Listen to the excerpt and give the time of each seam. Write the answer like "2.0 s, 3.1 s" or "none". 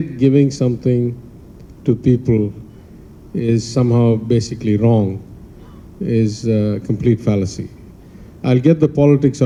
none